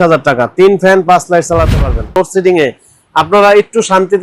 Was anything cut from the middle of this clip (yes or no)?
yes